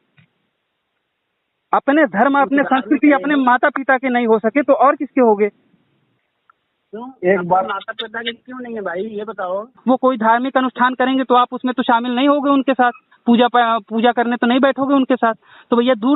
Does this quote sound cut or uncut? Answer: cut